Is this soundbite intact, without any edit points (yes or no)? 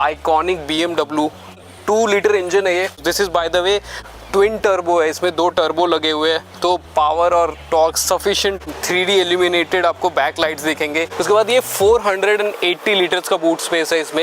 no